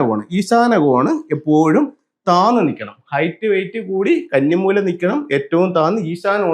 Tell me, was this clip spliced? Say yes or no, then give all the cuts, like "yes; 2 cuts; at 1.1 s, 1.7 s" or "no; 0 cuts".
no; 0 cuts